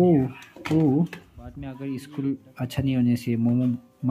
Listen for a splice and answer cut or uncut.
cut